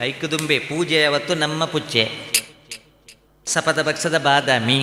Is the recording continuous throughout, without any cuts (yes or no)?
yes